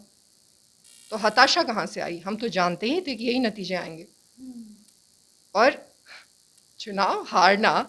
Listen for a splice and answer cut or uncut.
uncut